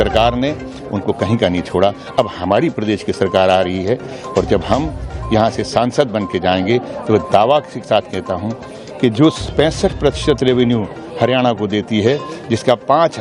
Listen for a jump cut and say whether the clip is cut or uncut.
uncut